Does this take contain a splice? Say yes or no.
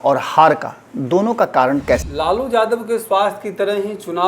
yes